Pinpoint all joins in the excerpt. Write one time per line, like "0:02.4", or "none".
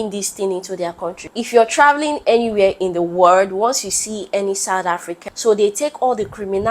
0:01.2
0:05.1